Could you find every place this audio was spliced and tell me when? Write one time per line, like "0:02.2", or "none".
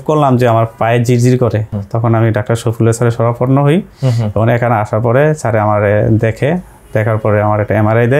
0:01.8